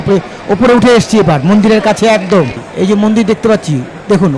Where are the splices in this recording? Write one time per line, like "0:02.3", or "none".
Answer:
0:02.6

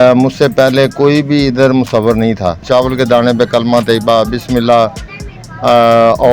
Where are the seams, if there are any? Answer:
0:02.6

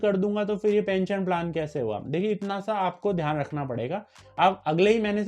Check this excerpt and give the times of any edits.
0:04.2

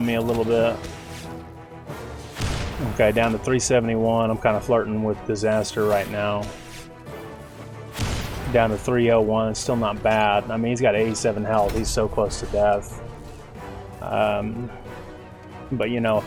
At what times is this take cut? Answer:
none

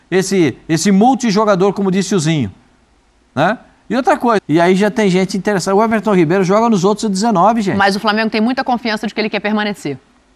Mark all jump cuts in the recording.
0:04.4

